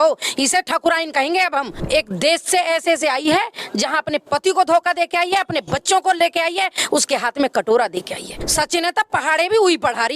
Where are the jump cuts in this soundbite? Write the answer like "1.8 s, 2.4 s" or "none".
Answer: 1.8 s, 8.4 s